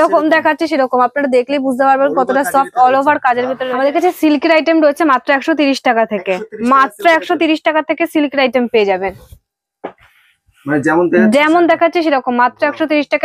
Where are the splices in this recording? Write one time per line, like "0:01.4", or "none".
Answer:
0:03.6